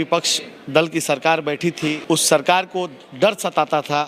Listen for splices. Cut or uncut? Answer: cut